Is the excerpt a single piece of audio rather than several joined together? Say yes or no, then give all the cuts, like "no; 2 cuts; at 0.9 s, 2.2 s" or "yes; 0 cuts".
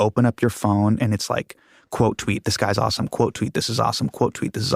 no; 1 cut; at 1.0 s